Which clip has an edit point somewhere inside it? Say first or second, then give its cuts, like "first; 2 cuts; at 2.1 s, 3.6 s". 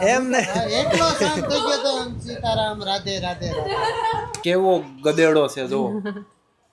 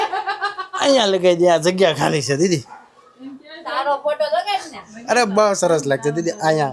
first; 1 cut; at 4.4 s